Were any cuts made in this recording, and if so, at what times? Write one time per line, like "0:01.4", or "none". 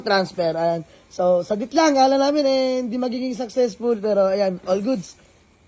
none